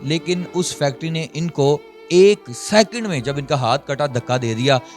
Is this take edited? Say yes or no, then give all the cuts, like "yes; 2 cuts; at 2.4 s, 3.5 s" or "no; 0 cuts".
yes; 1 cut; at 1.9 s